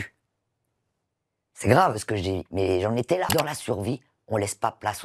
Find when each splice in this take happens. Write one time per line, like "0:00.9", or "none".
0:03.3